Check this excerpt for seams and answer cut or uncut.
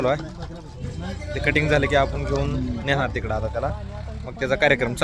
uncut